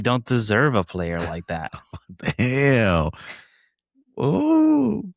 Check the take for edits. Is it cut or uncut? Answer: uncut